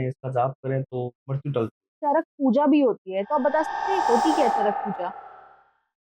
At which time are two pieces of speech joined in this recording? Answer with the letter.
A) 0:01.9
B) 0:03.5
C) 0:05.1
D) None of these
A